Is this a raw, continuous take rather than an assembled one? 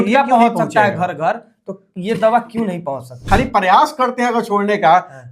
no; 1 cut; at 3.2 s

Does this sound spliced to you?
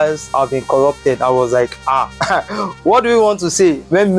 no; 0 cuts

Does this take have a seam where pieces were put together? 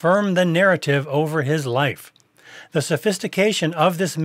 no; 0 cuts

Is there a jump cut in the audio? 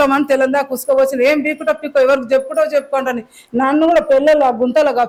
no; 0 cuts

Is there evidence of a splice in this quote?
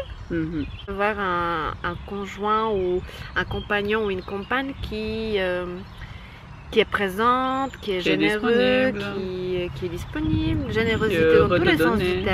yes; 1 cut; at 0.9 s

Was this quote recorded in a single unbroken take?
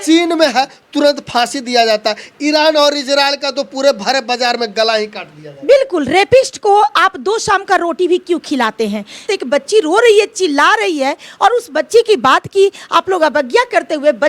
no; 1 cut; at 9.2 s

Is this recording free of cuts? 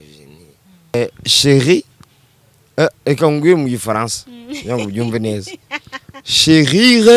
no; 1 cut; at 0.9 s

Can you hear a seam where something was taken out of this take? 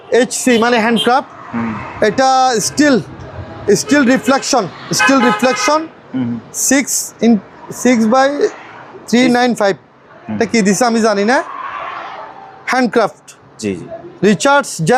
no; 0 cuts

